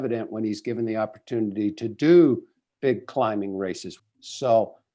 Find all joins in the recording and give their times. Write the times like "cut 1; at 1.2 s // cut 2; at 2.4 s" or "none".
cut 1; at 3.9 s